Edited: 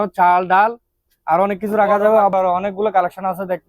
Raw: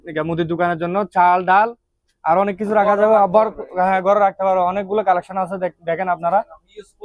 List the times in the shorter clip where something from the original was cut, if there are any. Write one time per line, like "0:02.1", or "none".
0:02.3